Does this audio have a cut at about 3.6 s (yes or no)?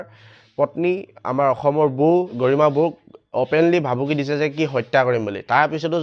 no